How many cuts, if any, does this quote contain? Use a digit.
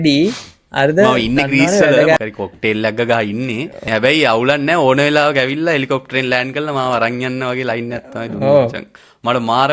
3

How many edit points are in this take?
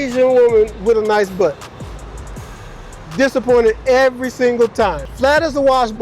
1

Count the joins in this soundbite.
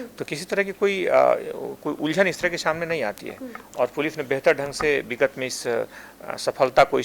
0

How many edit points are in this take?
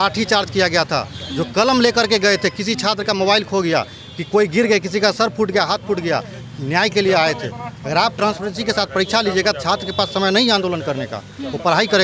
0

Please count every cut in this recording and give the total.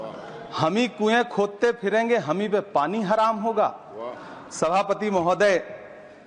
0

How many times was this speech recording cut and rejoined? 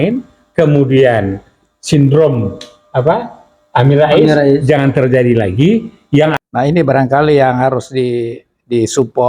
1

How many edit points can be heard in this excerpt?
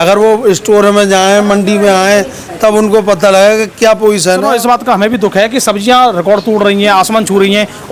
1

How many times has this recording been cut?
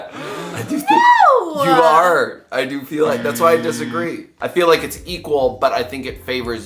0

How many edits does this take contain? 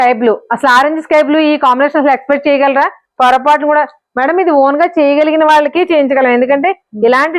0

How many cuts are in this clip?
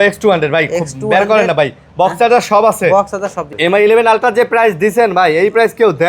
1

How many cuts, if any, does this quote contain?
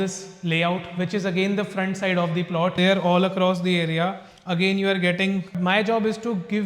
2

